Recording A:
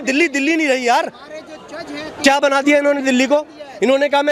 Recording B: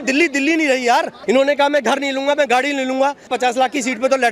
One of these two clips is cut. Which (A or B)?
B